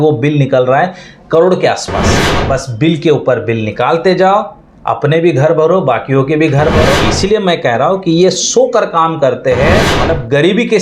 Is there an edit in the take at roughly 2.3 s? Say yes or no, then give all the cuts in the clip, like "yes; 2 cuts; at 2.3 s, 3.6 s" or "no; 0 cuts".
yes; 3 cuts; at 2.3 s, 6.9 s, 9.9 s